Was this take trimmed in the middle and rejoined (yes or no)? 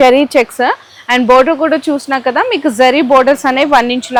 no